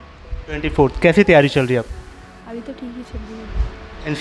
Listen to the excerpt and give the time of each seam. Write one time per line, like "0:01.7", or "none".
none